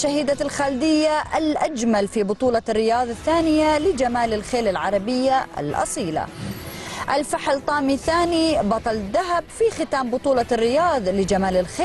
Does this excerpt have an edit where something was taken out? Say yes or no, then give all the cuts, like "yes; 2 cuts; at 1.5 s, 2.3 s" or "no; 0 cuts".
no; 0 cuts